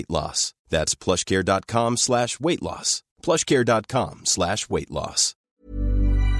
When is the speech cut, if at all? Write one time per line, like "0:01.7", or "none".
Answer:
0:05.4